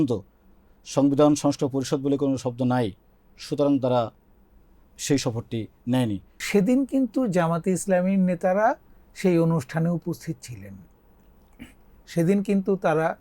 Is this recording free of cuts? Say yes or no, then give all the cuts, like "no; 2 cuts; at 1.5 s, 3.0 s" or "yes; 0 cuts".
no; 1 cut; at 6.3 s